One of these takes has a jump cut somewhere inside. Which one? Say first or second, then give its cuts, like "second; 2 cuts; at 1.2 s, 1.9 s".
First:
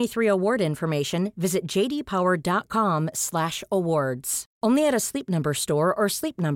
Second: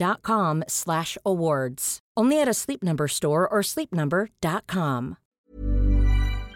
second; 1 cut; at 5.4 s